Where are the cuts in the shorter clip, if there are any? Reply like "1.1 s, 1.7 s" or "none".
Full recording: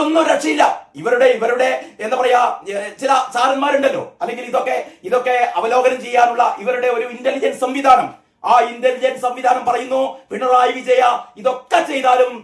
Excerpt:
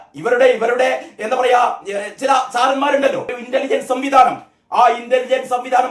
3.4 s